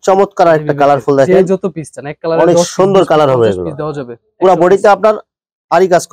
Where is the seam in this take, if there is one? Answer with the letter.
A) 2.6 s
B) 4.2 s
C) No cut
C